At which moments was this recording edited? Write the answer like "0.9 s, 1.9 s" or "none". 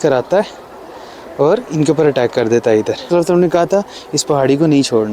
3.1 s